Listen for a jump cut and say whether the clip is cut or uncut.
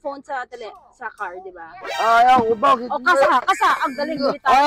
cut